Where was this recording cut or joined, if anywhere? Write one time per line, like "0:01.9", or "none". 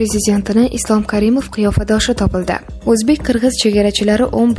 0:02.7